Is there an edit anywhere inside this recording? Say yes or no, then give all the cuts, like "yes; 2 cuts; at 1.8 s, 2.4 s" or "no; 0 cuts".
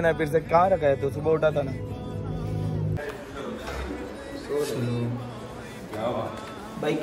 yes; 1 cut; at 3.0 s